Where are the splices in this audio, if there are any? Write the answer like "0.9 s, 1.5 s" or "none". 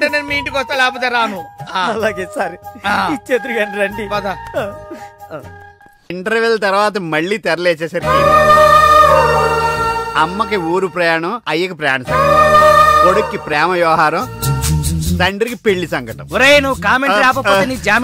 6.1 s

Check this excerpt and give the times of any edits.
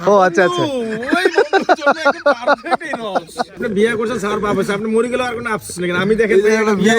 3.5 s

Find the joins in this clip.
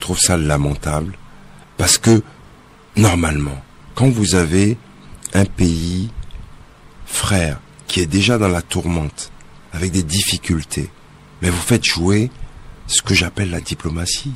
none

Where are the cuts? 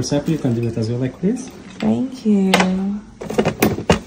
none

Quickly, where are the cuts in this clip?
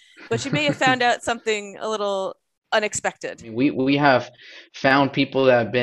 2.5 s, 3.5 s

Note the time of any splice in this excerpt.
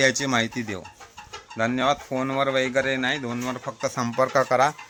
none

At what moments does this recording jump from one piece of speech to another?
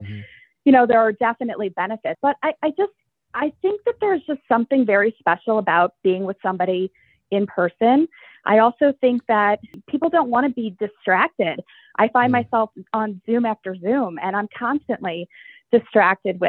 2.2 s, 9.7 s

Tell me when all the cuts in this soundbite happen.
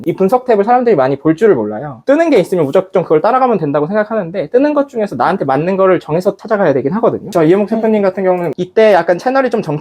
7.3 s, 8.5 s

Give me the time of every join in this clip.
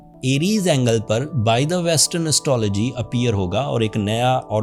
none

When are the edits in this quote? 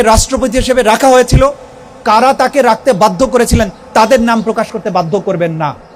none

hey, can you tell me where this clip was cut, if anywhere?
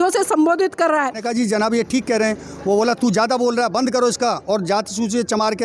1.2 s

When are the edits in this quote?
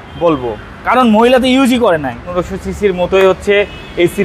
2.4 s

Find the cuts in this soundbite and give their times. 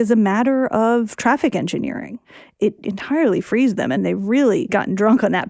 2.6 s, 4.0 s, 4.7 s

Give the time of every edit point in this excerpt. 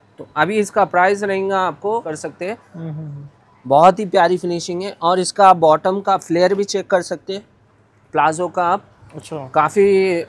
2.1 s

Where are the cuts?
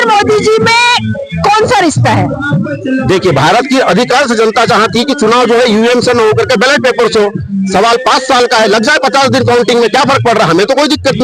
none

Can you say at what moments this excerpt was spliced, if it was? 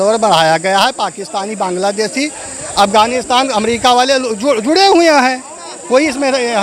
none

